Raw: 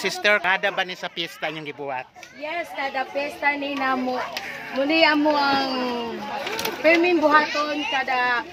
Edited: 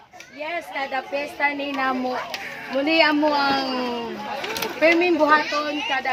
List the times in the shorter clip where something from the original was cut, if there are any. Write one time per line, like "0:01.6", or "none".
none

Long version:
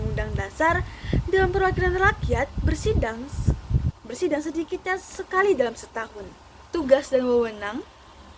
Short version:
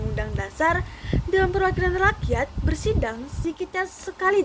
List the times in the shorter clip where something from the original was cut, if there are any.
0:03.4

